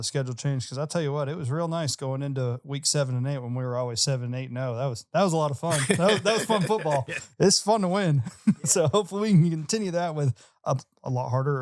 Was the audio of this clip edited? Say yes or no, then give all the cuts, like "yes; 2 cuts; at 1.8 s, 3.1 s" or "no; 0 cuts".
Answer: no; 0 cuts